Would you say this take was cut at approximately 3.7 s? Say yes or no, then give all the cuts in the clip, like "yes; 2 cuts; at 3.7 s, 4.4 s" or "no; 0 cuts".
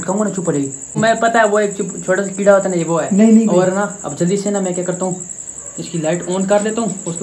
no; 1 cut; at 0.9 s